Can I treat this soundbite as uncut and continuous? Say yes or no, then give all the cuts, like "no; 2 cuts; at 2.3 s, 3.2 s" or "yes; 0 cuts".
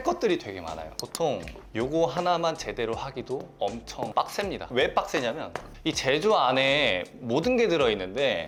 yes; 0 cuts